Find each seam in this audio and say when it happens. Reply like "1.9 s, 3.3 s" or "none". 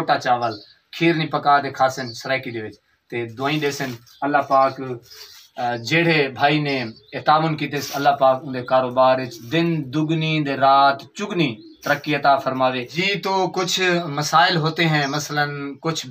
12.9 s

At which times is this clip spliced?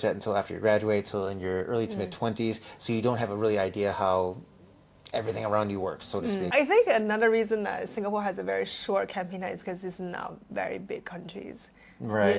6.4 s

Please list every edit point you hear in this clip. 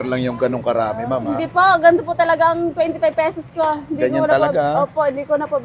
none

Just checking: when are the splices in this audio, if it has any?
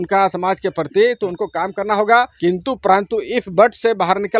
2.3 s

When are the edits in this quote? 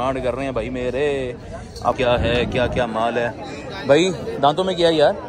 2.0 s

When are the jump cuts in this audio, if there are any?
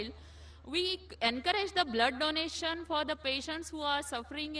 none

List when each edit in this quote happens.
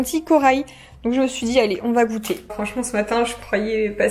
2.5 s

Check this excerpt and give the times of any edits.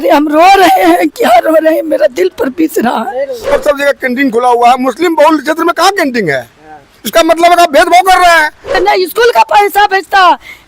3.5 s, 8.8 s

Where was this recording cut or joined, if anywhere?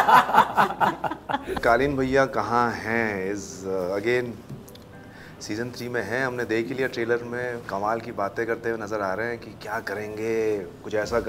1.5 s

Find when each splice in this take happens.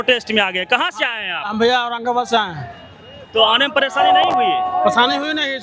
none

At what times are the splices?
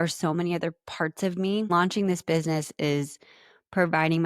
1.7 s

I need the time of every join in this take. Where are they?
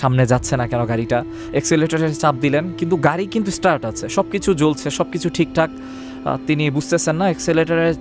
none

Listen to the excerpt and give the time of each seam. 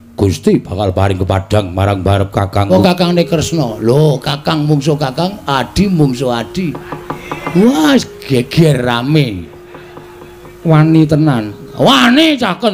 2.7 s

